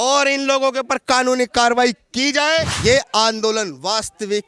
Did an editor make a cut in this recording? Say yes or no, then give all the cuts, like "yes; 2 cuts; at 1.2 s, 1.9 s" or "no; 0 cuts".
yes; 1 cut; at 2.7 s